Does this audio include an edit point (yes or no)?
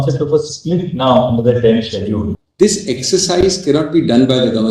yes